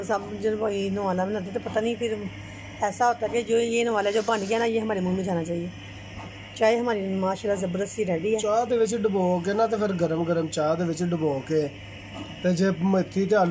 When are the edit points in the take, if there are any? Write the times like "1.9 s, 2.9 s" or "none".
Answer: none